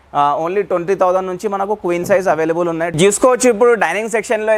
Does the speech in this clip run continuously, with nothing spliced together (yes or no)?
no